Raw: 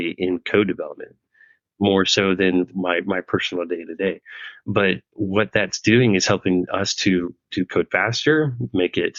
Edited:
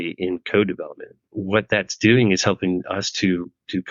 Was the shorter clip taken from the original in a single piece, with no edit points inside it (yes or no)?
no